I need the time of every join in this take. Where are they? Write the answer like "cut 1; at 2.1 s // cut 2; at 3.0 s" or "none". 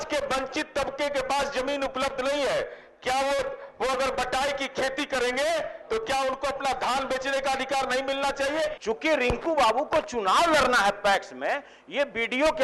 cut 1; at 6.7 s // cut 2; at 8.8 s